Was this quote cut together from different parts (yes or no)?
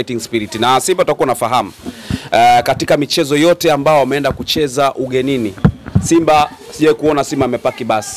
no